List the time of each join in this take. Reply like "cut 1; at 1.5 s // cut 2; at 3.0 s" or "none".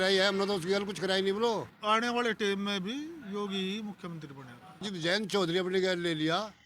cut 1; at 1.7 s // cut 2; at 4.8 s